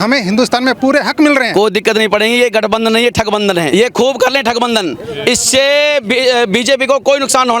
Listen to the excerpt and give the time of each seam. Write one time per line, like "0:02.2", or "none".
0:01.5
0:03.7